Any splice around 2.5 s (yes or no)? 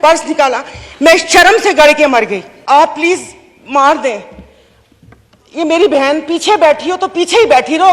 yes